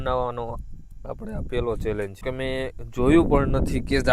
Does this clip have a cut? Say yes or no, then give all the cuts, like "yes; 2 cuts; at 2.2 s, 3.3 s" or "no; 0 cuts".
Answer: yes; 1 cut; at 2.2 s